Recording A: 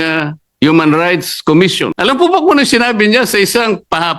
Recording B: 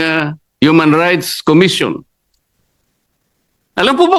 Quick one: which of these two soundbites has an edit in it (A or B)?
A